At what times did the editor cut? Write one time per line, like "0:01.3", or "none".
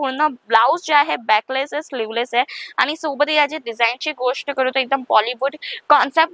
none